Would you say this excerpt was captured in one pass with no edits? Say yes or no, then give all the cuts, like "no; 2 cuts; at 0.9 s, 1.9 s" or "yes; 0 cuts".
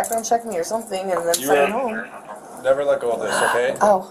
yes; 0 cuts